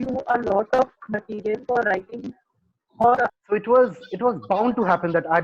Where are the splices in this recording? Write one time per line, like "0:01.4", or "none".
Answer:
0:03.3